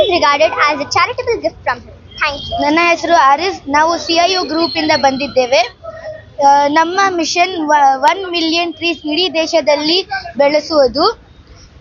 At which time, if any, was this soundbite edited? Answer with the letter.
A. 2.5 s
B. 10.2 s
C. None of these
A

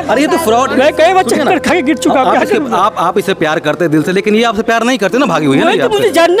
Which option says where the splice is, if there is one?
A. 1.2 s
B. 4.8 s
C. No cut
C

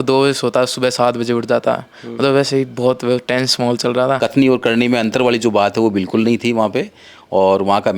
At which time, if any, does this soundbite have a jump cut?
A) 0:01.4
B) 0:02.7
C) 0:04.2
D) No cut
C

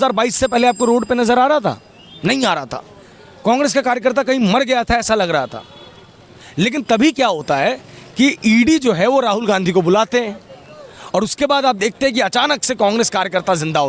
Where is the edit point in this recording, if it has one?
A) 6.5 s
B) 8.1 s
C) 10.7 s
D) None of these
D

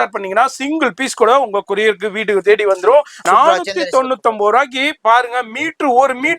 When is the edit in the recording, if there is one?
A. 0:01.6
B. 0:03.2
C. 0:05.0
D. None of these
B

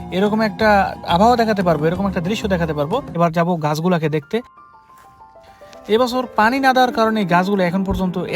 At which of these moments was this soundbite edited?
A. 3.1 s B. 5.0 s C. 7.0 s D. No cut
A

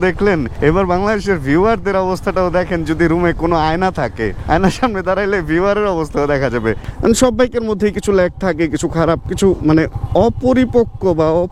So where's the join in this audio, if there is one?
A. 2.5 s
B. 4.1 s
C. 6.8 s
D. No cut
C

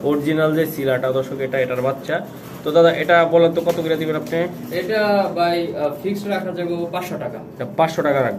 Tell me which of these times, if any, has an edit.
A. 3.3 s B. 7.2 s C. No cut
C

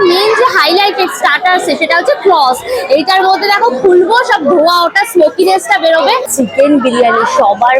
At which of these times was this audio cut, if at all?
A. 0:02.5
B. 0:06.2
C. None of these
B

